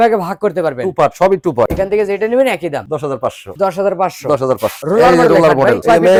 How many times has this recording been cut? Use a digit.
0